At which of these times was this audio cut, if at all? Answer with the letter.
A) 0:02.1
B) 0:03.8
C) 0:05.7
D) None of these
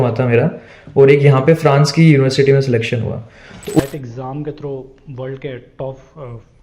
B